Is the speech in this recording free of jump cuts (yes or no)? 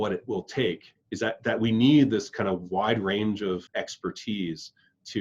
no